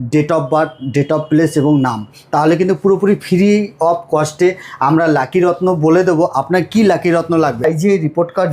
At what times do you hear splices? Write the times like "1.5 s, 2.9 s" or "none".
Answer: 7.6 s